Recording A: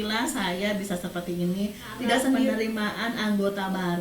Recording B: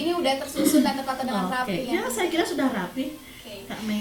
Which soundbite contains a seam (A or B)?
A